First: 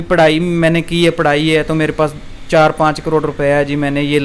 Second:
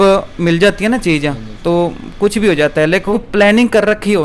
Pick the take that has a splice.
second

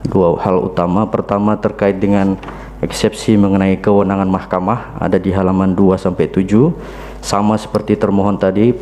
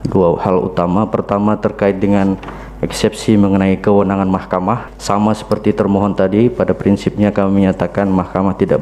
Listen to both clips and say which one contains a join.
second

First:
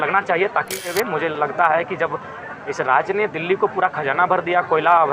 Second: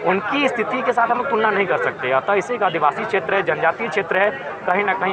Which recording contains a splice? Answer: first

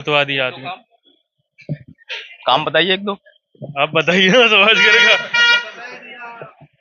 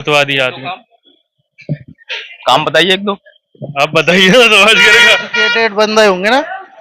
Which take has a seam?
second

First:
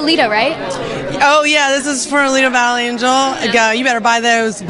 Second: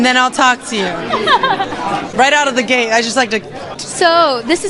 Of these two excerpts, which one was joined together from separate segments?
second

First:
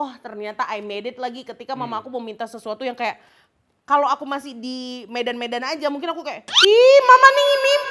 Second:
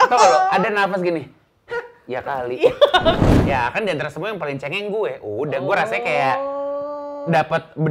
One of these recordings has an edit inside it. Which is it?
second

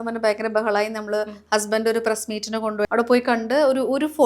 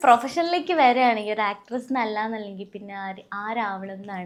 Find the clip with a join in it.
first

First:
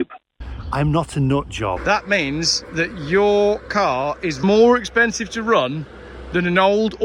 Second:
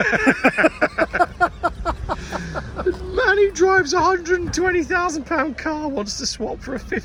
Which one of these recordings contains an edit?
first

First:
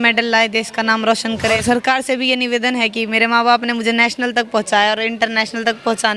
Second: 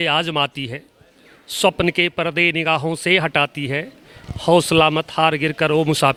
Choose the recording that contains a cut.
first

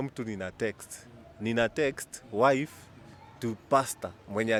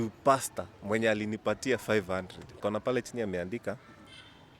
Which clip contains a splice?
second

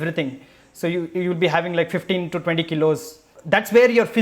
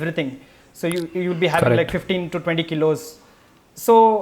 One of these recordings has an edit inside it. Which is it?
first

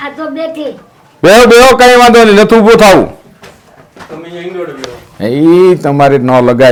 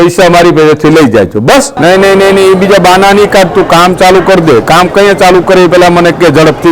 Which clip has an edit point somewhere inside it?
second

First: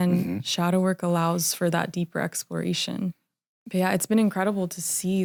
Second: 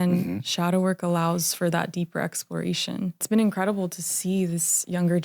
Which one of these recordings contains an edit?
second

